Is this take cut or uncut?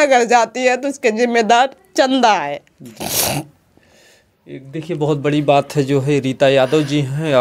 uncut